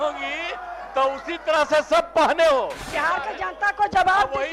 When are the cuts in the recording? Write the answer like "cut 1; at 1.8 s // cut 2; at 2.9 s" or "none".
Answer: cut 1; at 2.9 s